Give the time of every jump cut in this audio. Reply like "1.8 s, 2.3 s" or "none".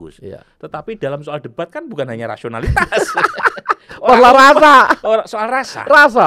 none